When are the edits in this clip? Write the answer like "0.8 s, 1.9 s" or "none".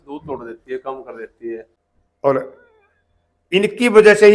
1.7 s